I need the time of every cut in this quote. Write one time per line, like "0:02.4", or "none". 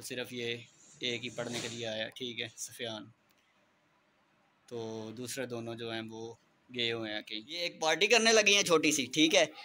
0:07.7